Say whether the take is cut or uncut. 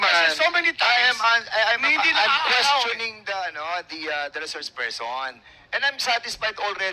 uncut